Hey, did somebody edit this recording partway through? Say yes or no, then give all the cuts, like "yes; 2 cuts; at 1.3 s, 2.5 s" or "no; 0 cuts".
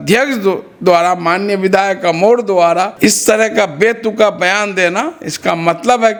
no; 0 cuts